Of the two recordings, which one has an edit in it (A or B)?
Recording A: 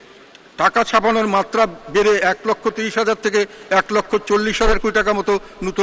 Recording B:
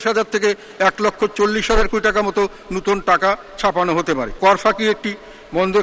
B